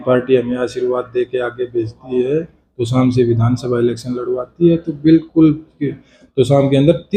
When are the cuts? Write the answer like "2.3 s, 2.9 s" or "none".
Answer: none